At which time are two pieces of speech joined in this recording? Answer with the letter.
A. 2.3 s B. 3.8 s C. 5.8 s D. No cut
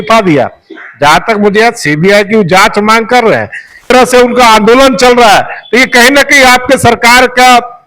B